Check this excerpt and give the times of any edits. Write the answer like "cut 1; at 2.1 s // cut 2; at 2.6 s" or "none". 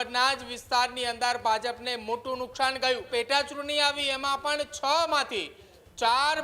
cut 1; at 3.1 s